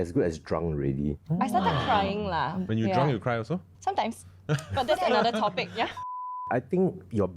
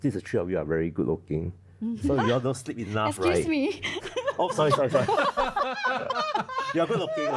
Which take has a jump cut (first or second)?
first